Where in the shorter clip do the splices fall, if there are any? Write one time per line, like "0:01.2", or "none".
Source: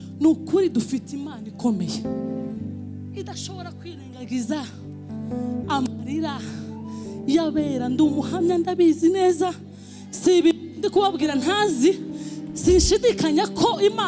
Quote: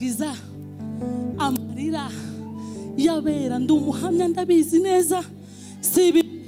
none